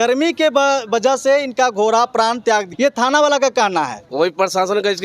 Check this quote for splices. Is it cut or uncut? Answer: cut